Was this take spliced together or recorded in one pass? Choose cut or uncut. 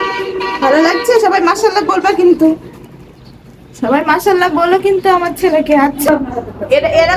cut